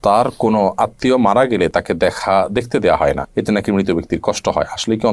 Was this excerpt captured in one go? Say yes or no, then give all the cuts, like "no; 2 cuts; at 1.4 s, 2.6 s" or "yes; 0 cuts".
yes; 0 cuts